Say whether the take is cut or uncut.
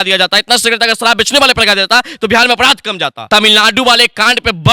cut